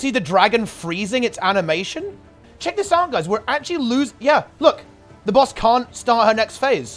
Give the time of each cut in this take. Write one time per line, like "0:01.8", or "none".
0:02.5